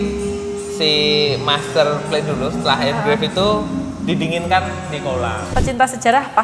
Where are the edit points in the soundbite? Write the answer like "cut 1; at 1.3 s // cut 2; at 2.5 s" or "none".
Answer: cut 1; at 5.4 s